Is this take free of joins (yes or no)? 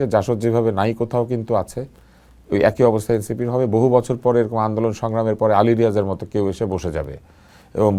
yes